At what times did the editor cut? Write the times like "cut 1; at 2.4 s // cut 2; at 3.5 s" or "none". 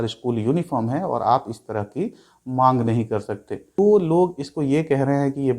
cut 1; at 3.7 s